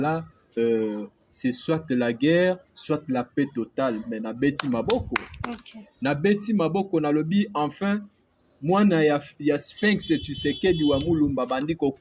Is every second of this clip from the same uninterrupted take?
yes; 0 cuts

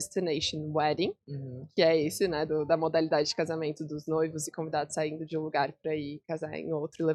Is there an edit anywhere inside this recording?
no; 0 cuts

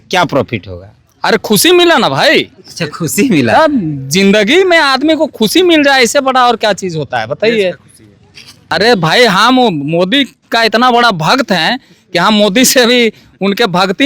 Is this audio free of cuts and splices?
no; 1 cut; at 8.7 s

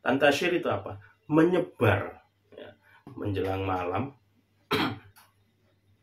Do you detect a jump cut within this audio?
yes; 1 cut; at 3.0 s

